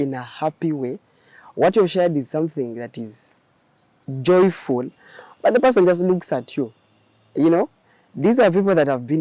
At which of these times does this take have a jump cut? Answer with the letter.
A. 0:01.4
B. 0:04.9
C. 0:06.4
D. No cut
D